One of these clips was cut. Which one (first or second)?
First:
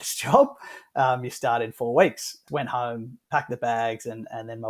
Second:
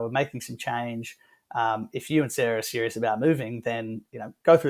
first